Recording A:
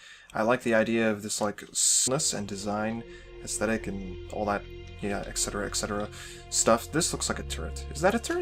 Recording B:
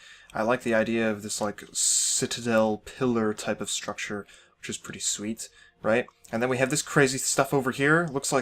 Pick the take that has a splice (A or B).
B